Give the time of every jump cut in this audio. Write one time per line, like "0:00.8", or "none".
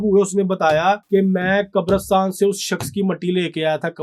0:01.0

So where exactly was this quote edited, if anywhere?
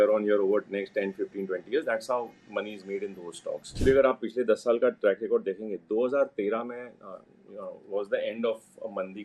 0:03.8

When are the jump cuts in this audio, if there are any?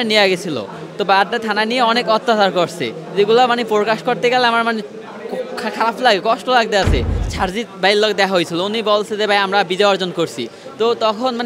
0:07.2

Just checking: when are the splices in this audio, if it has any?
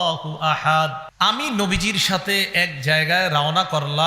0:01.0

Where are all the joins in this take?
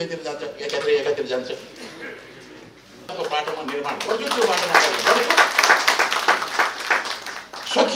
0:03.1

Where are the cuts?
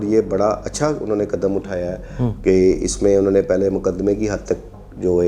none

